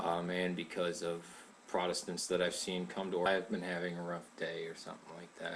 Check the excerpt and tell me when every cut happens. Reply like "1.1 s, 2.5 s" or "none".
none